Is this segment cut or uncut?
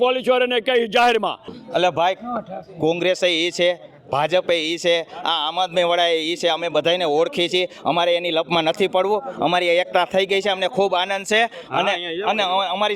cut